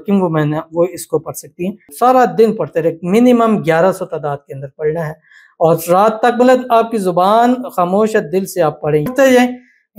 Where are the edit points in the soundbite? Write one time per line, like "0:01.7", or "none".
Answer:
0:01.8
0:09.1